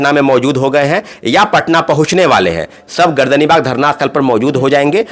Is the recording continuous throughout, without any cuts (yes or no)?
yes